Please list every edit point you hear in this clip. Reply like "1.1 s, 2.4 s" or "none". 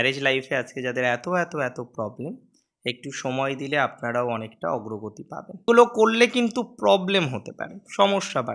5.6 s